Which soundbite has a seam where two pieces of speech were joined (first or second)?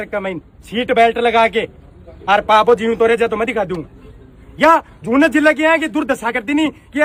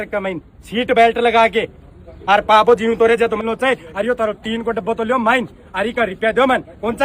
second